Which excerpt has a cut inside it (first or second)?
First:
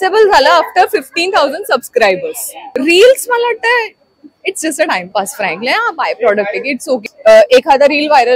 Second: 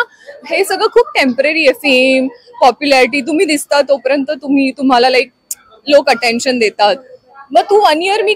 first